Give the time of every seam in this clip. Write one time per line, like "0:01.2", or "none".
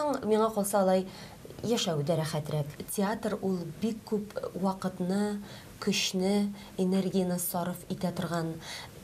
0:02.7